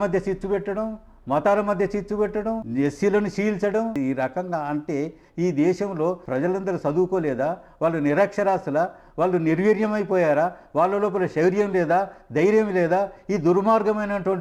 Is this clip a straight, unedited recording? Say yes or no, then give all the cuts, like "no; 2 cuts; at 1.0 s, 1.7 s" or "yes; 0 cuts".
no; 3 cuts; at 2.6 s, 4.0 s, 6.2 s